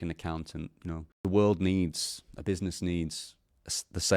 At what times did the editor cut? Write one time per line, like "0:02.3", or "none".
0:01.1

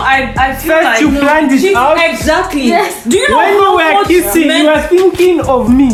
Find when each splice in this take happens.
none

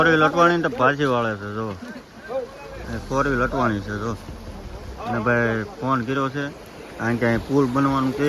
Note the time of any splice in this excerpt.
none

